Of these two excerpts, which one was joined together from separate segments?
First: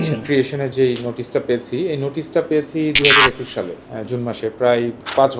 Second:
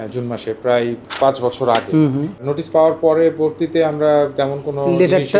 second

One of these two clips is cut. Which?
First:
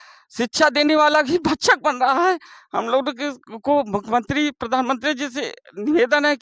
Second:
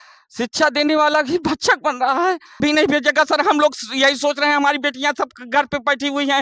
second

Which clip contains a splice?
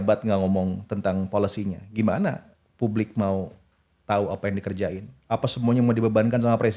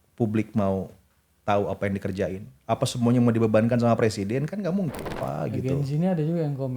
second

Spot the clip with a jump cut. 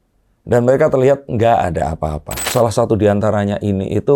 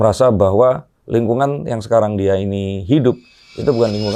first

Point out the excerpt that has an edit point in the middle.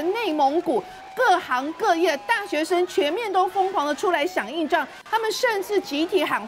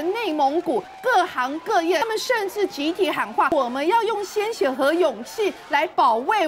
second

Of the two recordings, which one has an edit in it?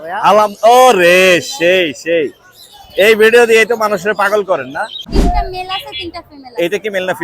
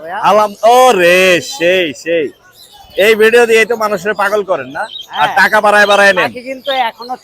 first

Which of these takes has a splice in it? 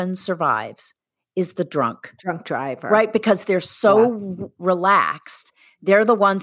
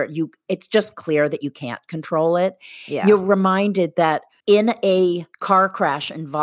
second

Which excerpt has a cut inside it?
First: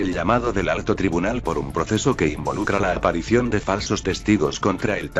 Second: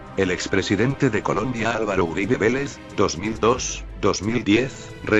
first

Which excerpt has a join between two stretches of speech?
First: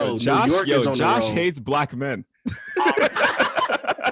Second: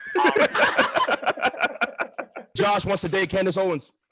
second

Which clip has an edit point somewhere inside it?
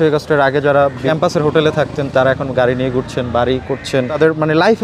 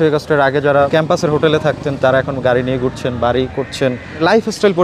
second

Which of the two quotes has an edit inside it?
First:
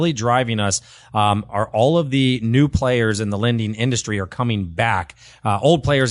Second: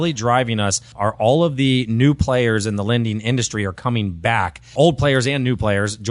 second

